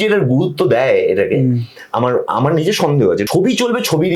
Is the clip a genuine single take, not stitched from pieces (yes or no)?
no